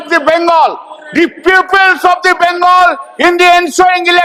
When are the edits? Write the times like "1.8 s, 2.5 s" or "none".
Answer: none